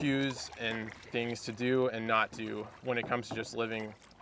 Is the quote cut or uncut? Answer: cut